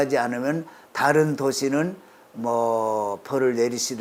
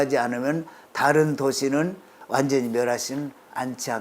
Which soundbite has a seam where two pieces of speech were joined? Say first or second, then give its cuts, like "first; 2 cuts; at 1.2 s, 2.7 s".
second; 1 cut; at 2.2 s